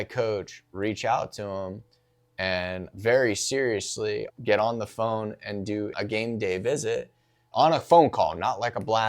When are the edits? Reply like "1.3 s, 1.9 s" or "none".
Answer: 2.9 s, 4.2 s, 5.9 s, 7.5 s